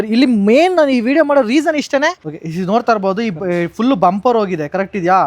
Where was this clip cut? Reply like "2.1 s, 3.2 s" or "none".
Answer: 2.2 s